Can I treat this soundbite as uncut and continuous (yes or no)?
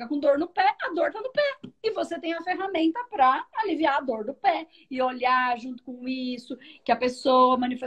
yes